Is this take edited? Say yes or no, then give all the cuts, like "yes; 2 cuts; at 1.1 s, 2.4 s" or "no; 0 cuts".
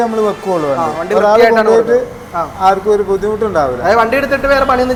no; 0 cuts